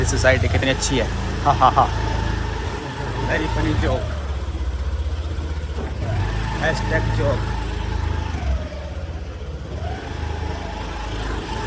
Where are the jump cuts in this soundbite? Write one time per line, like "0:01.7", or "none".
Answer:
none